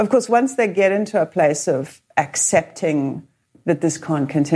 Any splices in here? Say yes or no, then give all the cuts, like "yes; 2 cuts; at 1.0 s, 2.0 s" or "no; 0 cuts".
yes; 1 cut; at 3.5 s